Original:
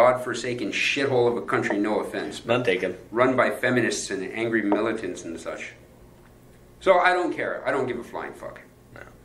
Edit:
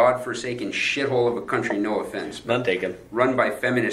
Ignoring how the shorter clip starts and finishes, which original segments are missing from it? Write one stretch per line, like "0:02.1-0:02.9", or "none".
none